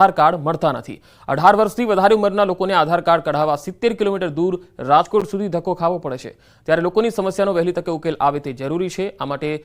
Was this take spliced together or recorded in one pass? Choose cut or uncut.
uncut